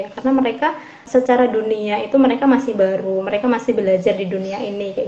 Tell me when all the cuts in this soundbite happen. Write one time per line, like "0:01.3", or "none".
0:01.0